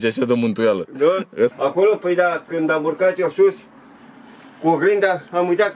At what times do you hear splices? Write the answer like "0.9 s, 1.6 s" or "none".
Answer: 1.5 s